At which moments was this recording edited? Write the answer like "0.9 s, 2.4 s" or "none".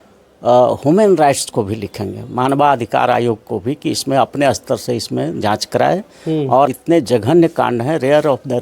6.7 s